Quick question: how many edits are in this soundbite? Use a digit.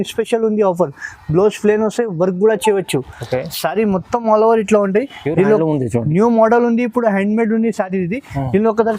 0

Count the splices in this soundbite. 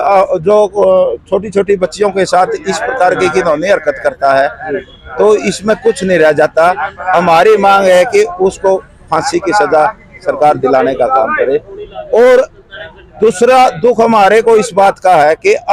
0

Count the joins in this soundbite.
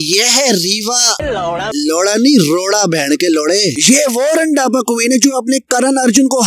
1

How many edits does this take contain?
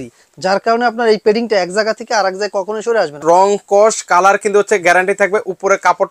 1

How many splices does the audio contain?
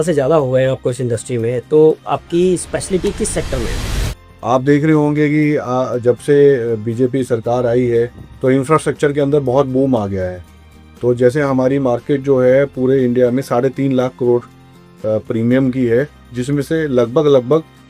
1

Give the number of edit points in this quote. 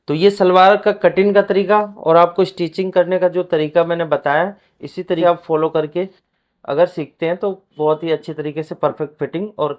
1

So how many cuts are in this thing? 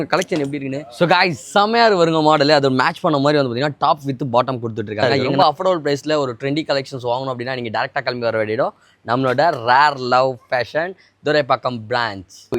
2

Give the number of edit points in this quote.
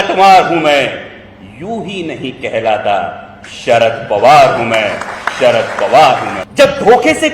1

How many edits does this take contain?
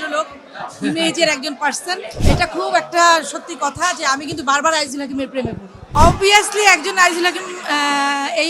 2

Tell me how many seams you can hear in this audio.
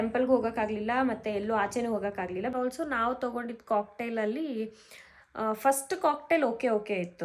1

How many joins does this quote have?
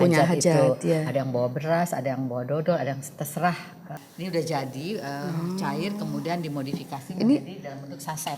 1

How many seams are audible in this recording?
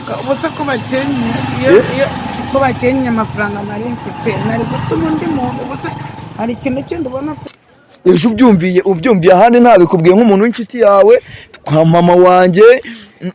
1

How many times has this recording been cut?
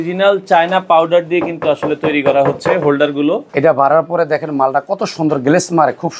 1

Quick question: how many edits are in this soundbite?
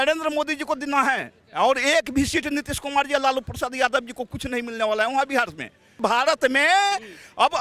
1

